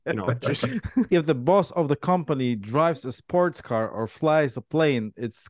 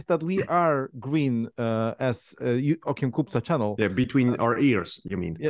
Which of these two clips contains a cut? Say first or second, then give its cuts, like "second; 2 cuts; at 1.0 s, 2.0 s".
first; 1 cut; at 1.1 s